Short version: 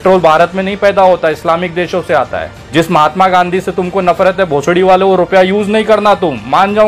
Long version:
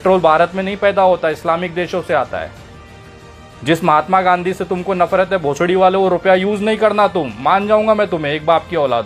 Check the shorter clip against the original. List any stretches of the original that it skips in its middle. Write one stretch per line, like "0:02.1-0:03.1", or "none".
0:02.6-0:03.5